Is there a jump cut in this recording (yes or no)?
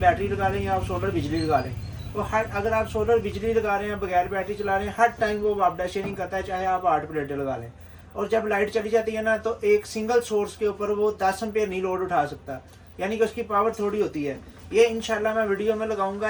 no